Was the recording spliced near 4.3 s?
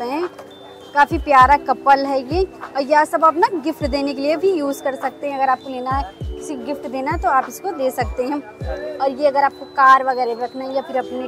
no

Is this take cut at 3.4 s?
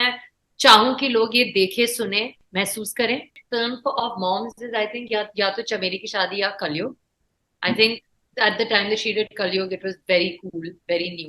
yes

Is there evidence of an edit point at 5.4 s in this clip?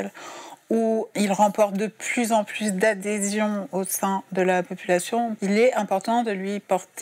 yes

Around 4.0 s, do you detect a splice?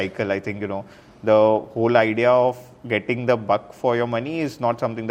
no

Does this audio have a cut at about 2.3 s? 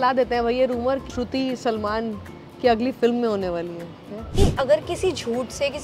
no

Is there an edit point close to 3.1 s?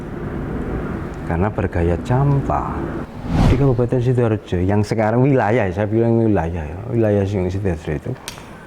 yes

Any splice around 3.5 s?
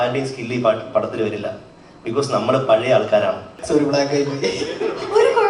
yes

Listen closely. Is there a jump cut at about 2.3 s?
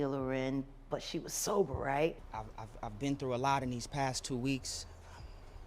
yes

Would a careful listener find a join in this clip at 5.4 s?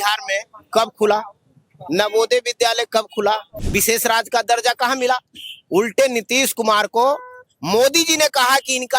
no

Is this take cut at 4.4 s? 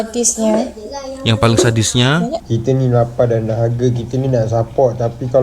no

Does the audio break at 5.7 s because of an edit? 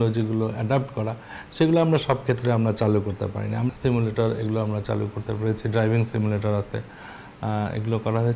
no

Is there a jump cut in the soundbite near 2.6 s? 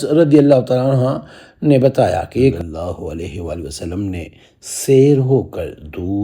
yes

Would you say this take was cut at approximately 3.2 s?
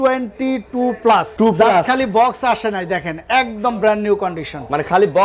no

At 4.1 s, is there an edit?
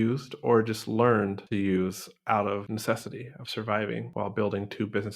yes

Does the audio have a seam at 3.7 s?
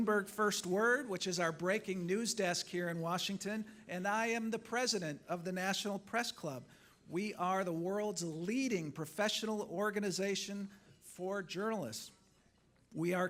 no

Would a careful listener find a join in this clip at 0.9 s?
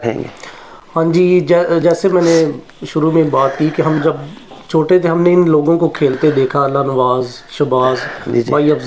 no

